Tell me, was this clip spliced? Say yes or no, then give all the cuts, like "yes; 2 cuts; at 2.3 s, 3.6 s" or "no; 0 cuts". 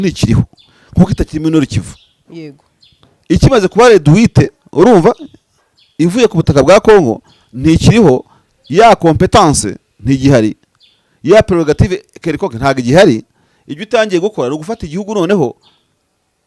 no; 0 cuts